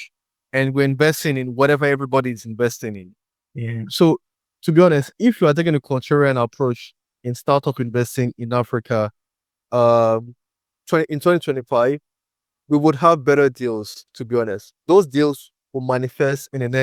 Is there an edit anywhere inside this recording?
no; 0 cuts

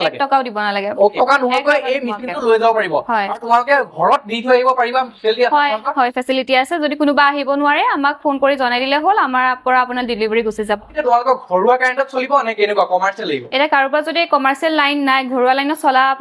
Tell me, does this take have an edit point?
yes; 2 cuts; at 1.1 s, 10.9 s

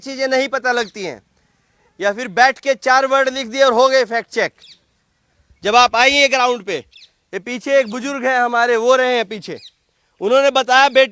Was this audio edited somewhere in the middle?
no; 0 cuts

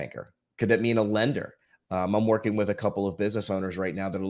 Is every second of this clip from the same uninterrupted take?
yes; 0 cuts

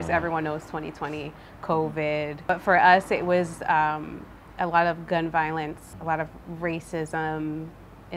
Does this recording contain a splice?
no; 0 cuts

